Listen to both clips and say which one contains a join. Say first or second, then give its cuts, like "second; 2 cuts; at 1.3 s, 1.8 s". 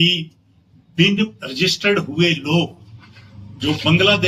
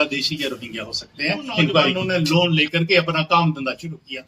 second; 1 cut; at 2.0 s